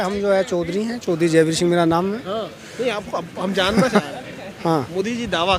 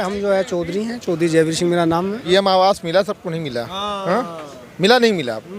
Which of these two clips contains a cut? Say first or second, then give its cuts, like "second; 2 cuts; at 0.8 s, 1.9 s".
second; 1 cut; at 2.2 s